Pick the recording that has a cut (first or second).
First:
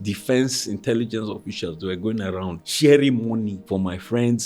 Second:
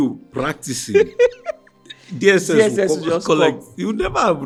first